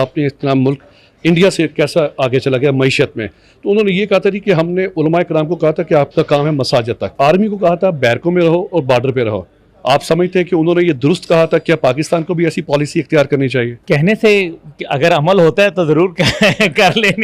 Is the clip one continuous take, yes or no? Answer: yes